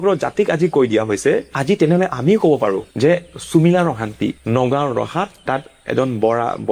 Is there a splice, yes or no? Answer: no